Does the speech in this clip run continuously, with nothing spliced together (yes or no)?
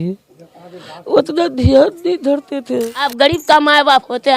no